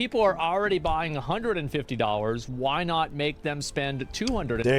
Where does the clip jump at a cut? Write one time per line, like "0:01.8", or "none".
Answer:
none